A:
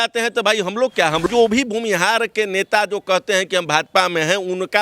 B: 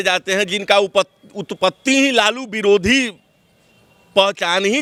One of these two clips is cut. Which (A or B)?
A